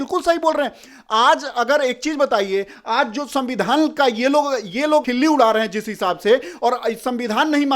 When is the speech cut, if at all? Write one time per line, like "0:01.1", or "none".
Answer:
0:05.0